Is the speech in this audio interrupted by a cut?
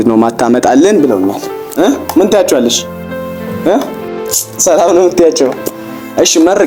no; 0 cuts

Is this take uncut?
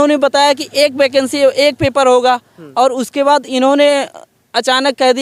yes; 0 cuts

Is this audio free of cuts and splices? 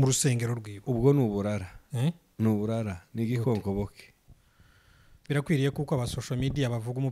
no; 1 cut; at 4.2 s

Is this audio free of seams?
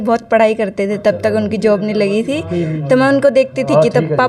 yes; 0 cuts

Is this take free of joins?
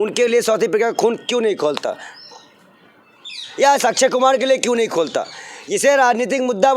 yes; 0 cuts

